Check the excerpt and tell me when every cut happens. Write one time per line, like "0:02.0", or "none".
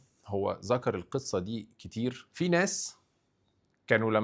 0:02.2